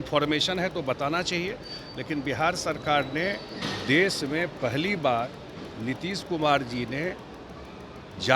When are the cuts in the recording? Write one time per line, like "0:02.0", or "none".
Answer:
none